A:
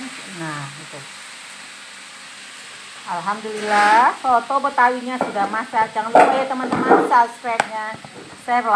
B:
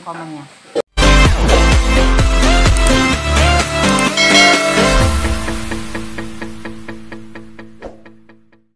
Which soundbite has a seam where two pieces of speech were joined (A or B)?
B